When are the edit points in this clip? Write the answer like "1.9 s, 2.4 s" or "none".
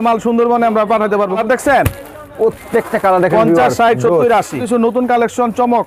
1.4 s, 4.6 s